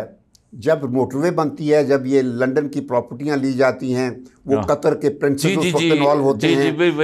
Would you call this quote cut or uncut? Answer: uncut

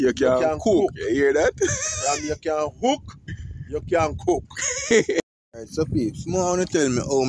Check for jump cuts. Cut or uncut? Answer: cut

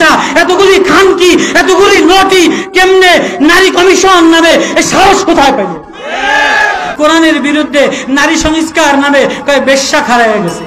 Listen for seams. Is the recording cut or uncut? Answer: cut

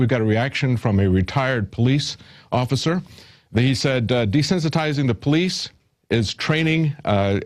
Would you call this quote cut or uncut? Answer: cut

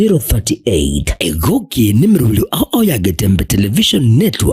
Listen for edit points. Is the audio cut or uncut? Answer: cut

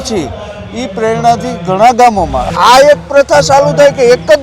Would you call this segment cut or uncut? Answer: cut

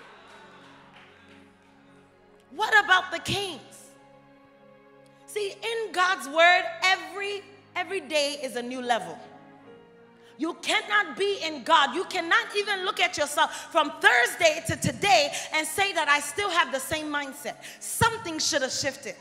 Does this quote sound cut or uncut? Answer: uncut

